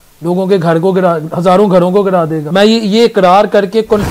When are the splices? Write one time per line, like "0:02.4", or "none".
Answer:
0:02.4